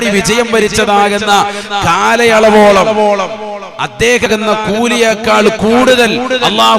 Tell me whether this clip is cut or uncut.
cut